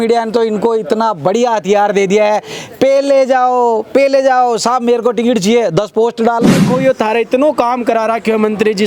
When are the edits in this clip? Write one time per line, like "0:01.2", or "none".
0:06.6